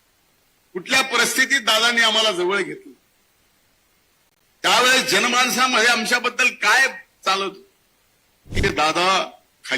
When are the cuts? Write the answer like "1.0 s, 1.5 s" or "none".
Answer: 8.6 s